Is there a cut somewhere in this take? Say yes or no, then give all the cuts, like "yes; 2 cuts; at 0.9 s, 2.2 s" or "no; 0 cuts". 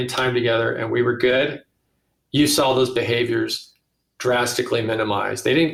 no; 0 cuts